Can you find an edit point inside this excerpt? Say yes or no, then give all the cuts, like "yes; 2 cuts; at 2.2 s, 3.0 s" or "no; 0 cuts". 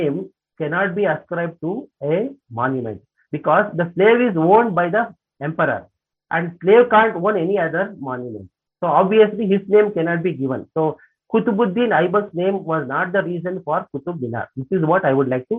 no; 0 cuts